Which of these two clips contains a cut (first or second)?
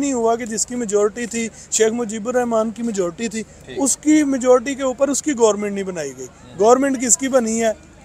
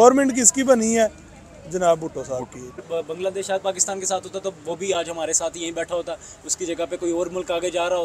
second